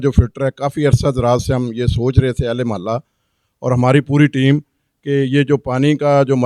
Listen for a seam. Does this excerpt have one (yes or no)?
no